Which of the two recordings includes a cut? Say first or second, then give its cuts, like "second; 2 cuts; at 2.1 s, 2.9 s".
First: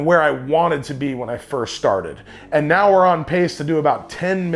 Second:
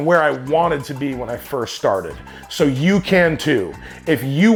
first; 1 cut; at 2.3 s